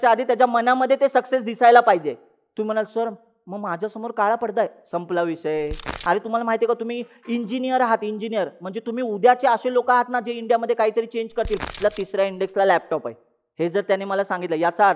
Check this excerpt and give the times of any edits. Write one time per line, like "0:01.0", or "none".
0:05.9
0:11.8